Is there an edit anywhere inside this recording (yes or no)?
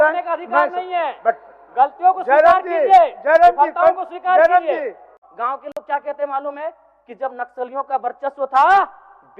yes